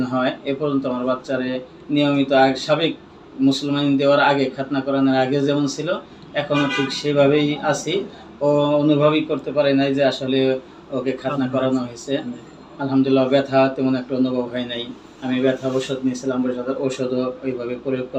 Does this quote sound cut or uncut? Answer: uncut